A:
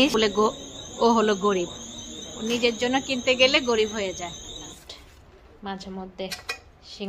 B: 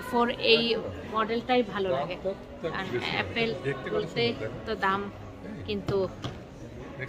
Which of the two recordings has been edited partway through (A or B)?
A